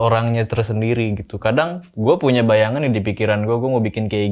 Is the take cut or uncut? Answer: uncut